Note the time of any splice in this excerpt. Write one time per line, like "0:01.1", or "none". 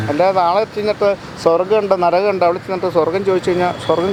none